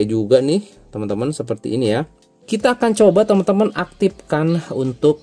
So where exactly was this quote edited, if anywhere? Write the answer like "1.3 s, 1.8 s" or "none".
2.3 s